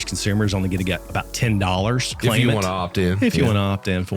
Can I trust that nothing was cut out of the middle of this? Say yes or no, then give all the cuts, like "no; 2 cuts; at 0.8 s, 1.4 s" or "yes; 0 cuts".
no; 2 cuts; at 1.0 s, 2.1 s